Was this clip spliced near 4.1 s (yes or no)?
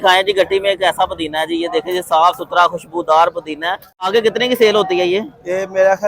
yes